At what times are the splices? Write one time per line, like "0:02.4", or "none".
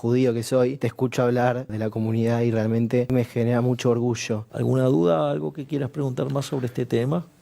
0:00.8
0:01.7
0:03.1
0:04.5